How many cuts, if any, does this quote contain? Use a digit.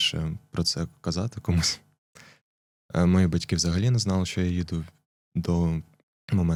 0